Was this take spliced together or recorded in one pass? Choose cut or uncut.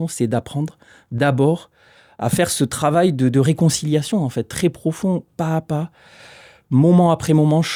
uncut